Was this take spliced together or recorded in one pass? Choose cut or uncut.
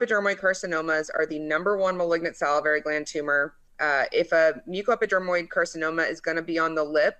uncut